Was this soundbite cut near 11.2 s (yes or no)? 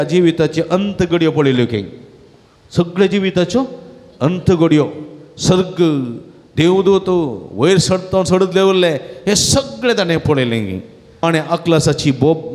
yes